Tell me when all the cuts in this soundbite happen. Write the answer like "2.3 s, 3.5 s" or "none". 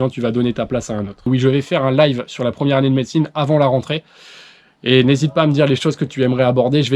1.3 s